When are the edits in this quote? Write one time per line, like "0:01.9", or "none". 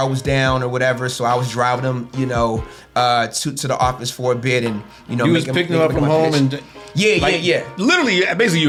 none